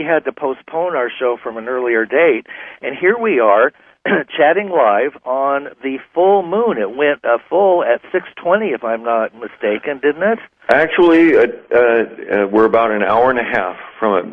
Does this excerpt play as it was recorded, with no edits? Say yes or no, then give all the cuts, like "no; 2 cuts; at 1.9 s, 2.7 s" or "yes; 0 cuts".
yes; 0 cuts